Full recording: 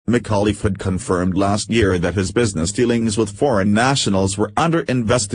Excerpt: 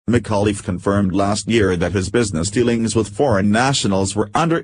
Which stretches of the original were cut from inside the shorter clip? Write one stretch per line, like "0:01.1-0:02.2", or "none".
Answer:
0:01.0-0:01.3